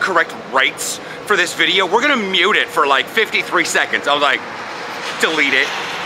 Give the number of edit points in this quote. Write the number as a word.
zero